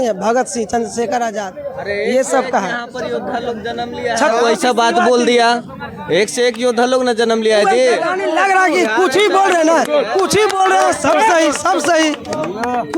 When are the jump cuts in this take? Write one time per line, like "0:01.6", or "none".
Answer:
none